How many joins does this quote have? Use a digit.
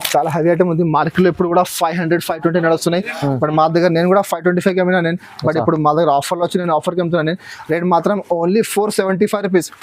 0